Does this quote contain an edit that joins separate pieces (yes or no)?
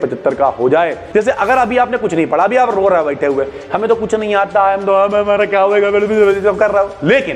yes